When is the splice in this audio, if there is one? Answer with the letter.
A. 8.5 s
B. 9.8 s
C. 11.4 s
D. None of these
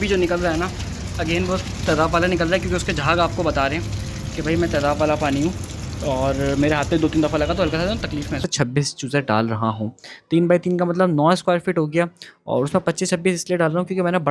A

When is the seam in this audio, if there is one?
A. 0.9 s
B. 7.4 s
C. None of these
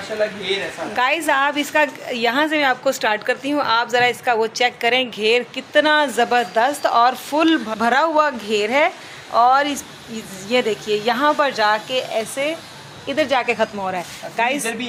C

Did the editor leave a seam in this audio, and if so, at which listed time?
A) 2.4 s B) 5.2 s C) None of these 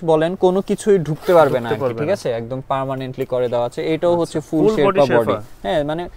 C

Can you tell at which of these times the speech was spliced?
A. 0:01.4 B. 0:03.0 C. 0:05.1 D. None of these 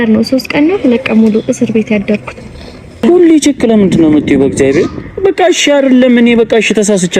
B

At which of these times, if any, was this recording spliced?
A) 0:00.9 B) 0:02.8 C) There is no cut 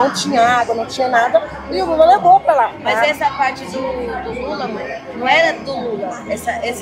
B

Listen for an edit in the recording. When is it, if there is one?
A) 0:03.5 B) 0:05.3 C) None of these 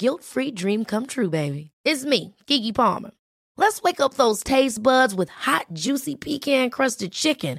C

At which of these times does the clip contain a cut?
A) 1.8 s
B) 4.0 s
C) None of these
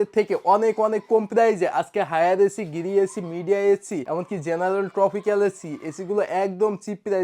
B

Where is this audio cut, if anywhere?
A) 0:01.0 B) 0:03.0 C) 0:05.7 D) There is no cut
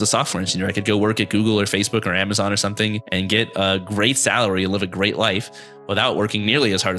B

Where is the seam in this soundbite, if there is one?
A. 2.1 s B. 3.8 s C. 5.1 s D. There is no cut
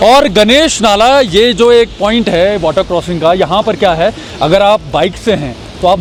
D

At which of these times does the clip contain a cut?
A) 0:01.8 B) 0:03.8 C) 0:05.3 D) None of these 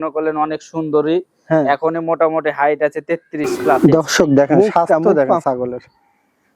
B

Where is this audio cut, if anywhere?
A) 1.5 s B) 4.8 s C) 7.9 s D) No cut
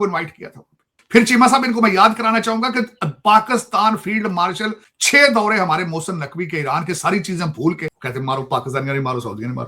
C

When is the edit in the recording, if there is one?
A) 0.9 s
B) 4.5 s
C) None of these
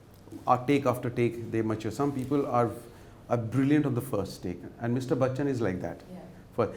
C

